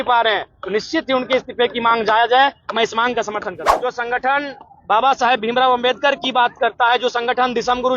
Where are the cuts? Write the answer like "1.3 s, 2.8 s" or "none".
3.6 s